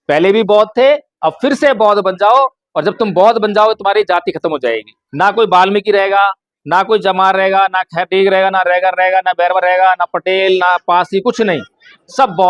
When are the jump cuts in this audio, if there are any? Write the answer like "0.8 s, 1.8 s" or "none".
5.0 s